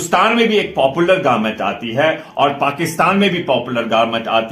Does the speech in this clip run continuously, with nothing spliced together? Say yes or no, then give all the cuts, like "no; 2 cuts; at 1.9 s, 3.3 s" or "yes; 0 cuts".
yes; 0 cuts